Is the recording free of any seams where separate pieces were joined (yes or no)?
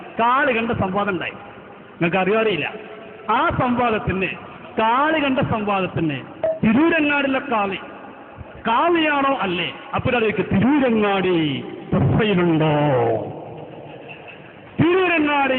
yes